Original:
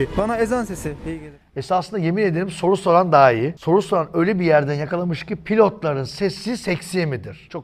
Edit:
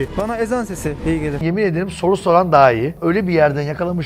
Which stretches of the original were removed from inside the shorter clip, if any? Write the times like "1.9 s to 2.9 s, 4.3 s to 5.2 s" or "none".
1.4 s to 2.0 s, 3.6 s to 4.1 s